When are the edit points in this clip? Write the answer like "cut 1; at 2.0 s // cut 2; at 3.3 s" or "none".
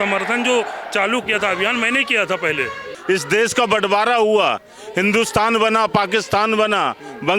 cut 1; at 2.9 s